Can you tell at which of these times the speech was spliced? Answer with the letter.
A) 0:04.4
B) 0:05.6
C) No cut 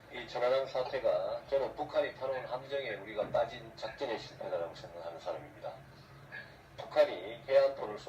A